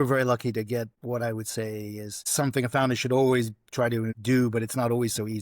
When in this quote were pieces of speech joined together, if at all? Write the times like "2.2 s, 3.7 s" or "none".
1.0 s, 2.2 s, 4.1 s